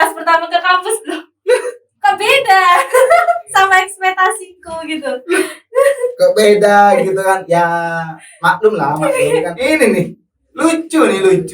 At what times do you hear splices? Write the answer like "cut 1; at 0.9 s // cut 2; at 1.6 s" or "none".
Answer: cut 1; at 9.0 s